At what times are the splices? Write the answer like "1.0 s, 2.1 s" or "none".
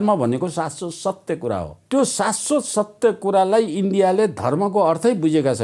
1.8 s